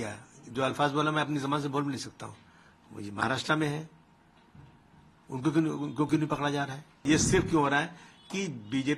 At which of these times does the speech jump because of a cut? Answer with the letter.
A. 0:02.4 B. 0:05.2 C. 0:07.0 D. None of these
C